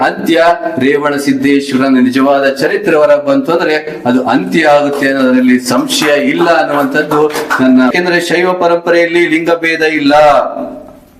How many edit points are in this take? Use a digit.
1